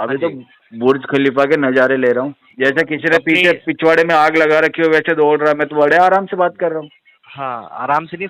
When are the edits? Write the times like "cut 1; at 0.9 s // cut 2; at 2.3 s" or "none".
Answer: cut 1; at 2.4 s